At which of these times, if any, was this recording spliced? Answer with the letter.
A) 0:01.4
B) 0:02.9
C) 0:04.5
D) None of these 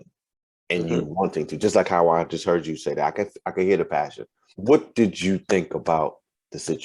C